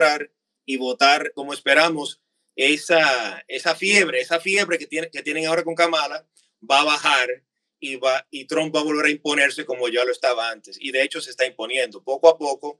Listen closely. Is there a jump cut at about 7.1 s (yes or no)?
no